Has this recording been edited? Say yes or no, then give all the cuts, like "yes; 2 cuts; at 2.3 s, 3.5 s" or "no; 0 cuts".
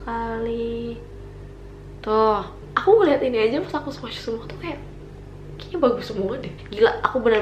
yes; 2 cuts; at 2.7 s, 6.5 s